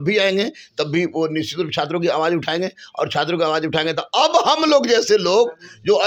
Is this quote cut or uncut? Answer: uncut